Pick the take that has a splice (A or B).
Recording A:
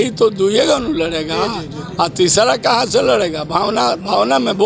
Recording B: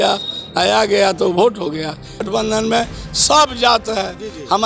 B